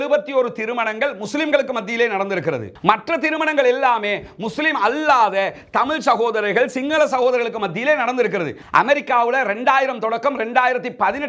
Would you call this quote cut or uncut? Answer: cut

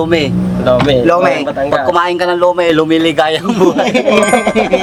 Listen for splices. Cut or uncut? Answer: uncut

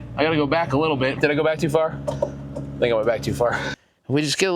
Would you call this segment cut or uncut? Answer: cut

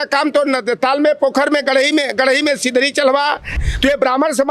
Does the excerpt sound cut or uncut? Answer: cut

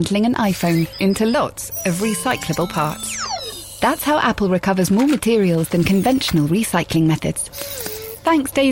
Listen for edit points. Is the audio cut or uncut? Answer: uncut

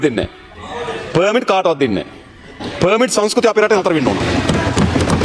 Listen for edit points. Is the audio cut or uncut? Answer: uncut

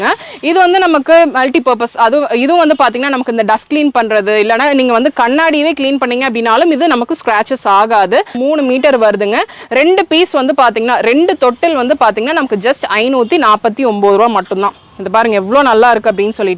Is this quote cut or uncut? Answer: cut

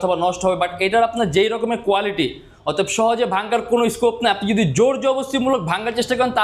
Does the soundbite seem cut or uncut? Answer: uncut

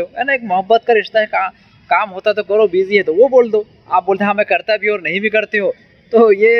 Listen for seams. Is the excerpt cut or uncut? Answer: uncut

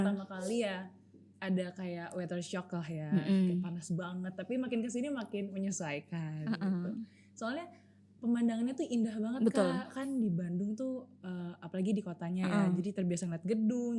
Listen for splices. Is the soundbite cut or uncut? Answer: uncut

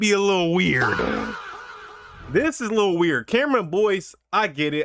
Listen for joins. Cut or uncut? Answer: uncut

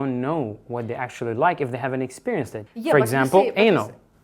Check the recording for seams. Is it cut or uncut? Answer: cut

